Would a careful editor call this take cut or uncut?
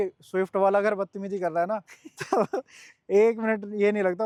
uncut